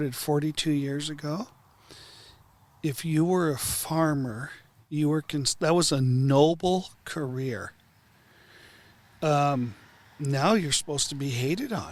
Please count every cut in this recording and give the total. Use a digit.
0